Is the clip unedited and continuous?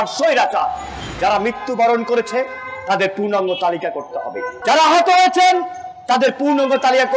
no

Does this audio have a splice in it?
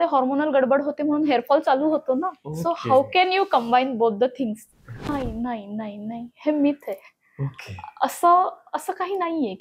yes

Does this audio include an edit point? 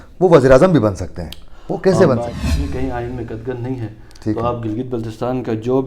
yes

